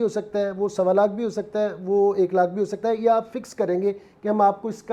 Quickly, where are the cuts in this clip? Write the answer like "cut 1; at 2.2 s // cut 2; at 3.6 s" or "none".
none